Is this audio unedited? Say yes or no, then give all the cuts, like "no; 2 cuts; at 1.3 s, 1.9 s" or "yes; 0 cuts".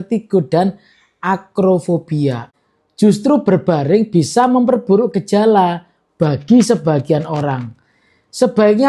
no; 1 cut; at 2.5 s